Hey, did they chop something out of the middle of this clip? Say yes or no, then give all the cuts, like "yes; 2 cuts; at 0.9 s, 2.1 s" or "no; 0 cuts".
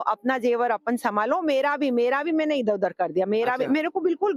no; 0 cuts